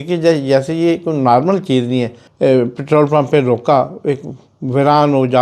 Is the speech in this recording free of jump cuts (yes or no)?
no